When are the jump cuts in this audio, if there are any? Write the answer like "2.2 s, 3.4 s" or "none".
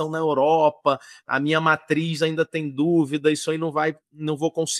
none